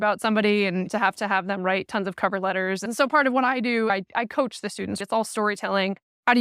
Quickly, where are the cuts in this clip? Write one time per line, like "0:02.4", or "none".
0:00.9
0:02.9
0:03.9
0:05.0